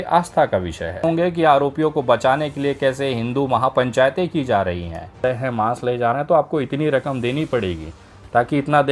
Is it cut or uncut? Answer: cut